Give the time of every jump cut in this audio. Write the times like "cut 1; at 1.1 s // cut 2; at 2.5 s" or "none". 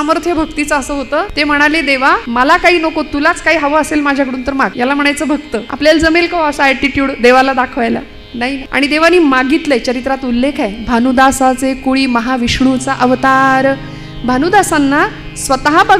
cut 1; at 1.3 s // cut 2; at 2.2 s // cut 3; at 4.7 s // cut 4; at 5.7 s // cut 5; at 8.6 s